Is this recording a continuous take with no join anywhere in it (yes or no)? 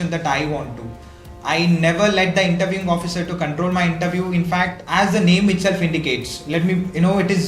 no